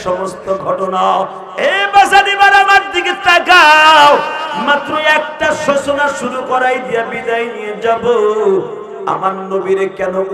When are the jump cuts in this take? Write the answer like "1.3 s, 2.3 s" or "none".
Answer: 1.4 s